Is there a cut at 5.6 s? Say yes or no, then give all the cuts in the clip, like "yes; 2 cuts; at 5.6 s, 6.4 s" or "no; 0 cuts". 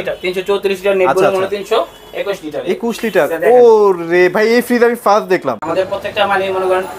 yes; 1 cut; at 5.6 s